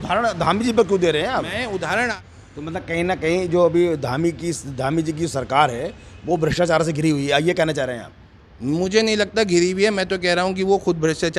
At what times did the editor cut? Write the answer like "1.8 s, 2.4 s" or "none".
2.1 s

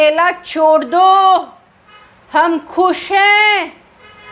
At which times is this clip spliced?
none

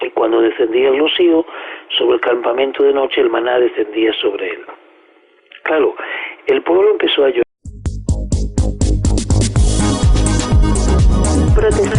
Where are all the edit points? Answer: none

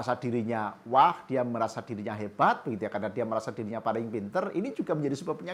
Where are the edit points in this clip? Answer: none

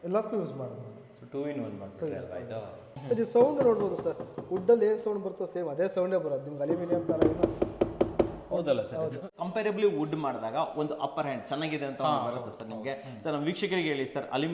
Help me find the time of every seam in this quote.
2.9 s, 9.3 s

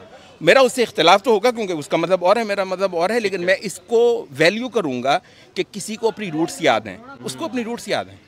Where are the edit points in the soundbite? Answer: none

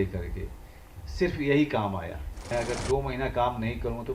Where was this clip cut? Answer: 2.3 s

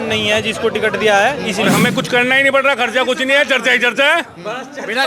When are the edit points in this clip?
1.7 s

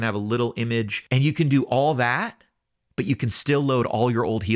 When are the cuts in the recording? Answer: 1.0 s

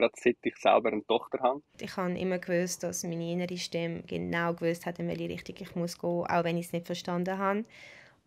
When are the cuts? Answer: 1.8 s

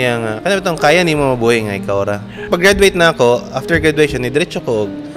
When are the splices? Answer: 2.3 s

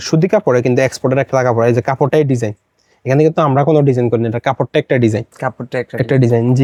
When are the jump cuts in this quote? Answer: none

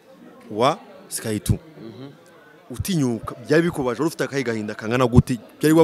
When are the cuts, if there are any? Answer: none

